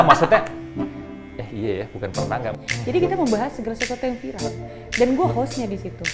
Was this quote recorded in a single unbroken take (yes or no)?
no